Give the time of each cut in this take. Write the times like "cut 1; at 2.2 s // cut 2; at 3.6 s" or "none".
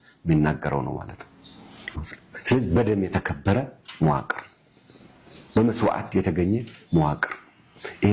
cut 1; at 1.9 s